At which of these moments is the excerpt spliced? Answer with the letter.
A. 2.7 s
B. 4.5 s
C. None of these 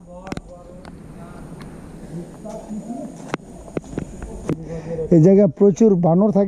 B